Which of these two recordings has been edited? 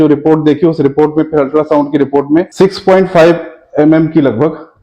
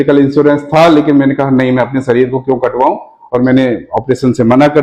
first; 1 cut; at 2.5 s

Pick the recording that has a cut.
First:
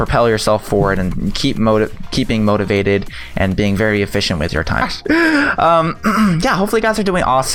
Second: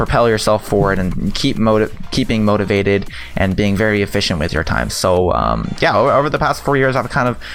second; 1 cut; at 4.9 s

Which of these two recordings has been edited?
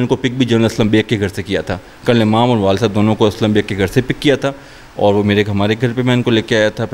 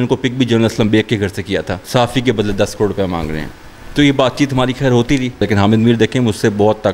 second; 2 cuts; at 1.8 s, 5.4 s

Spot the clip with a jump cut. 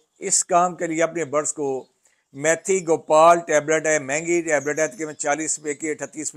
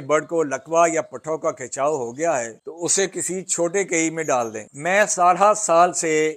second; 2 cuts; at 2.6 s, 4.7 s

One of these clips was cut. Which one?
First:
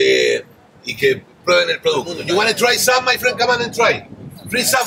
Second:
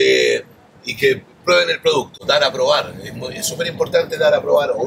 first; 1 cut; at 2.1 s

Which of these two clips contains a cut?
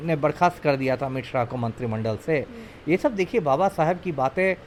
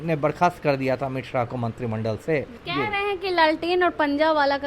second; 1 cut; at 2.6 s

